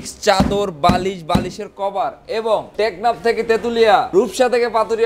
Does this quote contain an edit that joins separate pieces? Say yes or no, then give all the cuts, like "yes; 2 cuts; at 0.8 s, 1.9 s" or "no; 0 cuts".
yes; 2 cuts; at 2.7 s, 4.1 s